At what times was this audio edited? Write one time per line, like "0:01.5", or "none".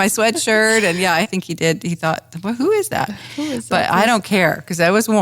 0:01.2